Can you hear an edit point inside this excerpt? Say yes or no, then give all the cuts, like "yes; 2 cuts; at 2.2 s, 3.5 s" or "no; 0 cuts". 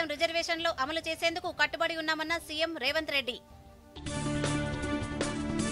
yes; 1 cut; at 3.7 s